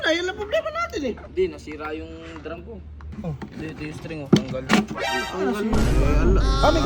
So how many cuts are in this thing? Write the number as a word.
one